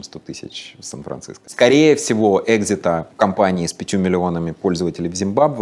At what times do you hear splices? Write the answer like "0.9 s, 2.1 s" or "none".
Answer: 1.4 s, 3.1 s